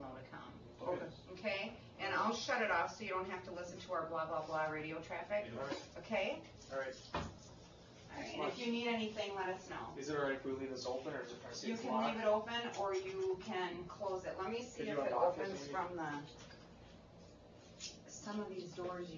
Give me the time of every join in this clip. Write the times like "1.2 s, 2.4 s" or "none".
18.3 s